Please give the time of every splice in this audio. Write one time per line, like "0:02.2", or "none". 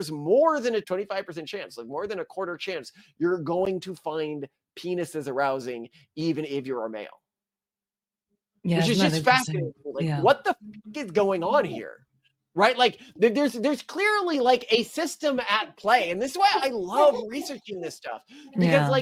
none